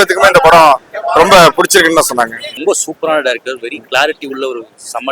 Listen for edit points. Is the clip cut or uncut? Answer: cut